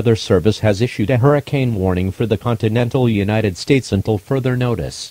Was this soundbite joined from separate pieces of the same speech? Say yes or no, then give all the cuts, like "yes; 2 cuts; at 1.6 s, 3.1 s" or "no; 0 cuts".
no; 0 cuts